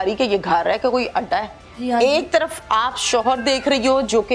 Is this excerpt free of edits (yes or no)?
no